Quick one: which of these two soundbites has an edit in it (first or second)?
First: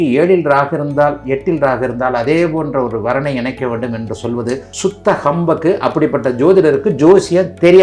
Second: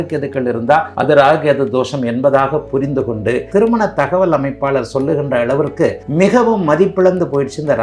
second